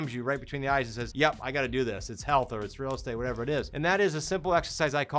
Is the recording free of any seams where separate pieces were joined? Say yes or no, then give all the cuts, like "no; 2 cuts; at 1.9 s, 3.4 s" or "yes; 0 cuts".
no; 2 cuts; at 1.0 s, 3.7 s